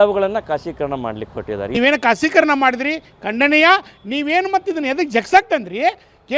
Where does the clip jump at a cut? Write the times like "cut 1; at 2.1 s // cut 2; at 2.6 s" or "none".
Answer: cut 1; at 1.7 s